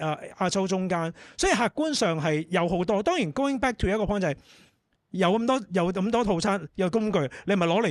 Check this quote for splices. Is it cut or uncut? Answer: uncut